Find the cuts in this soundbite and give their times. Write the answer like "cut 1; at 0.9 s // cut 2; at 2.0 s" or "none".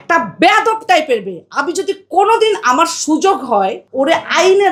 none